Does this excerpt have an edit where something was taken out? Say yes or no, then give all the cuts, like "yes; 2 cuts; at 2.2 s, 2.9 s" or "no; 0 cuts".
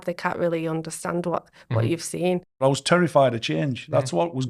yes; 1 cut; at 2.6 s